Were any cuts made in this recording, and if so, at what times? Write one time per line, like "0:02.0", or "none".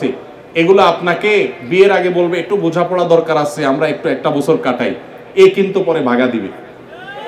none